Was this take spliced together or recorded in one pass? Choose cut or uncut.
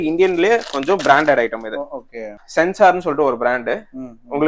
cut